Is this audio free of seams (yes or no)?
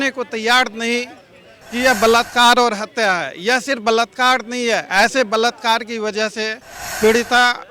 yes